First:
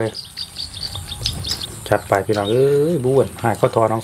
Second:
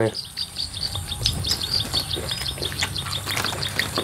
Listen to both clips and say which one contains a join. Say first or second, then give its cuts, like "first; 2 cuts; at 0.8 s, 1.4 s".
first; 1 cut; at 1.6 s